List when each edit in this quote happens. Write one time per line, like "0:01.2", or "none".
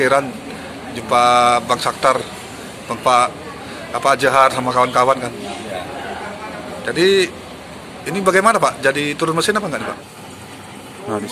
0:10.0